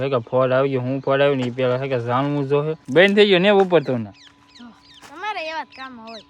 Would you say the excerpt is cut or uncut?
cut